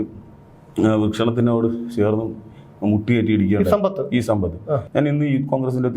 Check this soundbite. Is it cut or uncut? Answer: cut